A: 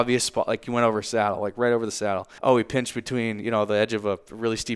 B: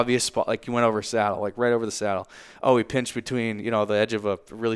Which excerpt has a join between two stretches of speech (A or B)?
A